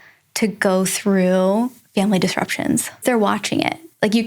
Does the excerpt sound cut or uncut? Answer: cut